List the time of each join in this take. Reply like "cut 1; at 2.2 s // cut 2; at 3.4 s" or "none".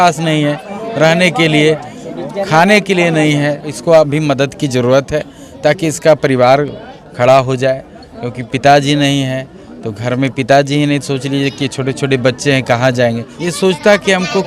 cut 1; at 3.7 s // cut 2; at 13.3 s

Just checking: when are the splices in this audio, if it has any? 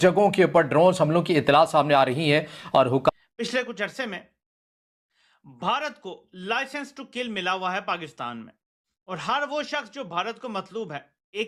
none

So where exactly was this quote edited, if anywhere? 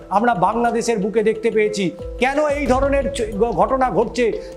none

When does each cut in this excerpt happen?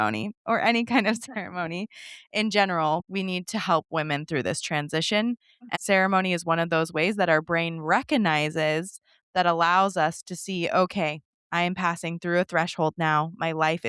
cut 1; at 3.0 s // cut 2; at 5.7 s

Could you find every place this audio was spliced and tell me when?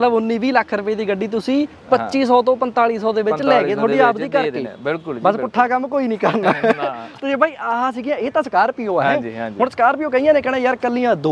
none

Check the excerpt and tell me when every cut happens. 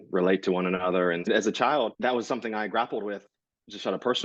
cut 1; at 1.3 s // cut 2; at 2.0 s

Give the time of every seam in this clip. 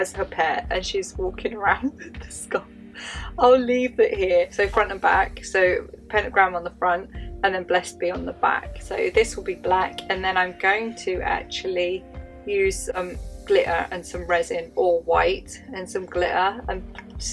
cut 1; at 4.5 s // cut 2; at 8.7 s

